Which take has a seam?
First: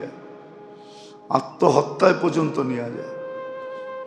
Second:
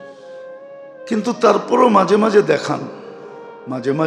second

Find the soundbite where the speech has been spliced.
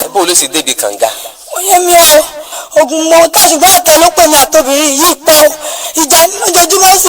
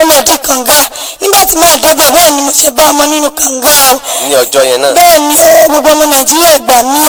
first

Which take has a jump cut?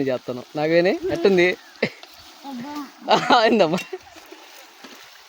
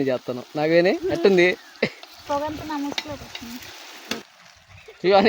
second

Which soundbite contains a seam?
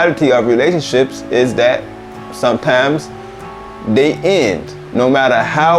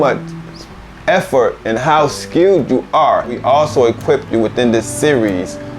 second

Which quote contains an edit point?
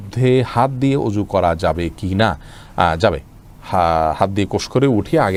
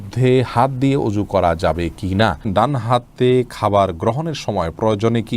second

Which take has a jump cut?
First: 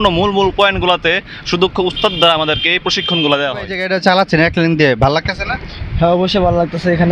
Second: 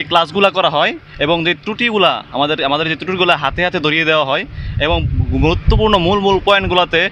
first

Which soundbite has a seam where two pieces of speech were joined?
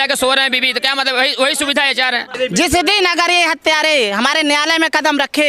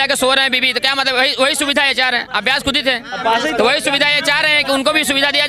first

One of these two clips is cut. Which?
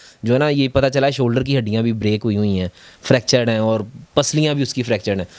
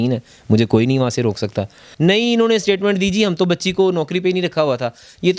second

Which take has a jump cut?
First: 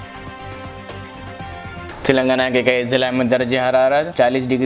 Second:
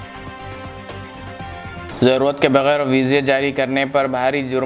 second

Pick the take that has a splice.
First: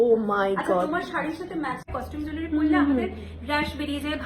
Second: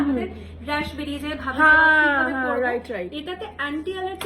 first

